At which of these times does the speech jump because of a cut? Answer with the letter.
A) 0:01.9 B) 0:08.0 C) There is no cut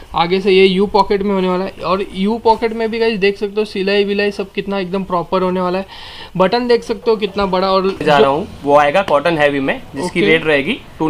B